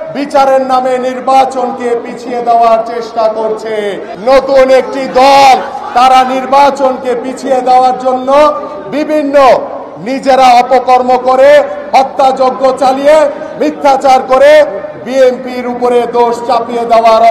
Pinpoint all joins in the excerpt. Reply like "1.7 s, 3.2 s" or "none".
4.1 s